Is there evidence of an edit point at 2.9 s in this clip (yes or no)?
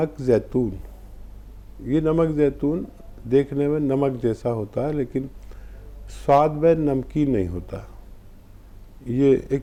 no